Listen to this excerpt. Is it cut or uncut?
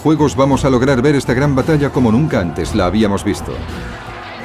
cut